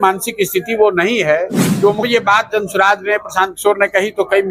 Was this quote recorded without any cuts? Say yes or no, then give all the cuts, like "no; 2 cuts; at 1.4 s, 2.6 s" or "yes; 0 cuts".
no; 1 cut; at 2.0 s